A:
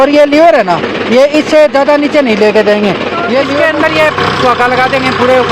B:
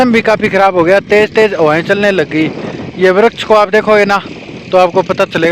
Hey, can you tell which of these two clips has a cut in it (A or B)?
A